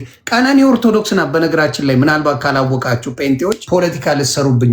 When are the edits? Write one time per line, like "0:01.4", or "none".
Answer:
0:03.6